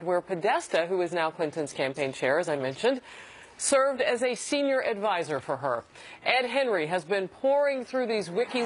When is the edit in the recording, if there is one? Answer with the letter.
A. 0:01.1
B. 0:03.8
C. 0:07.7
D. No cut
A